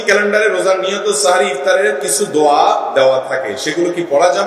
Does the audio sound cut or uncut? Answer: uncut